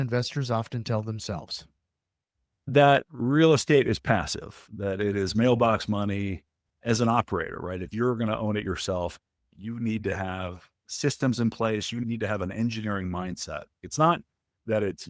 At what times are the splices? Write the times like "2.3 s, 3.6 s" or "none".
none